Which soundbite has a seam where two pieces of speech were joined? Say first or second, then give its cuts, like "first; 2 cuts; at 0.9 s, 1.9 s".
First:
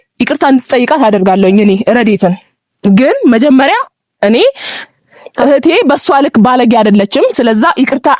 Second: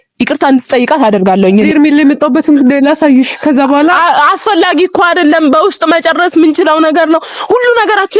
second; 1 cut; at 1.7 s